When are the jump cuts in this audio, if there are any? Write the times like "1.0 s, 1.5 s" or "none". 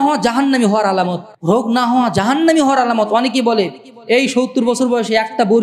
1.3 s